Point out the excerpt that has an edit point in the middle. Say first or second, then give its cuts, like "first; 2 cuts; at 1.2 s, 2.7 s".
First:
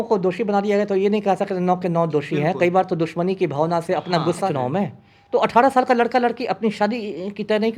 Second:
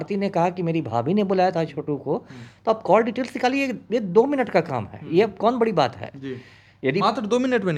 first; 1 cut; at 4.5 s